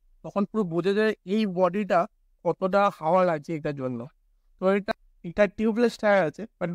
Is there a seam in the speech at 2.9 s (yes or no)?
no